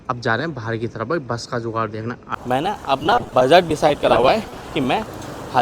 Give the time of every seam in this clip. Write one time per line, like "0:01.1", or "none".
0:02.3

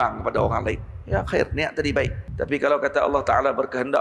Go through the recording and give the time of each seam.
0:02.2

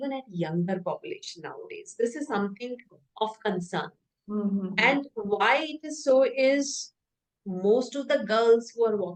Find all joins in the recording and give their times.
none

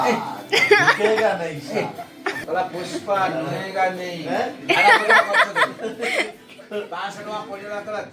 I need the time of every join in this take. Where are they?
0:02.3

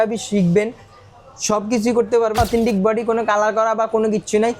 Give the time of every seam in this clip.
0:02.4

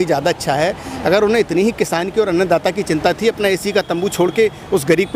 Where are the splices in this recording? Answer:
none

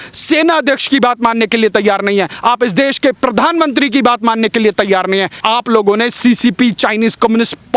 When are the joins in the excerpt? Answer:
0:05.3

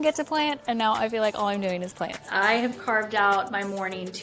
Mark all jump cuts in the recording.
0:02.2

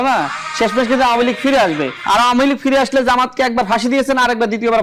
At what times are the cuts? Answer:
0:01.9

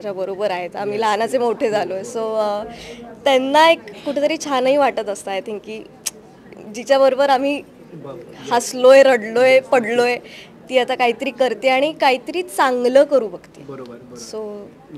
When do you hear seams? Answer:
none

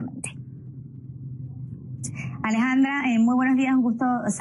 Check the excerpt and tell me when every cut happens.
none

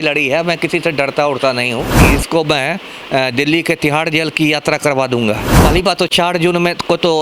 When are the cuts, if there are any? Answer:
0:01.9
0:05.5

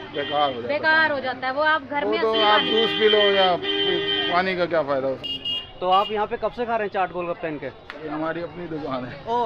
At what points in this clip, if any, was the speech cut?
0:05.2

